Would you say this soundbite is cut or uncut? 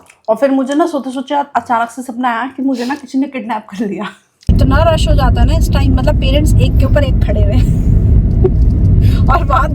cut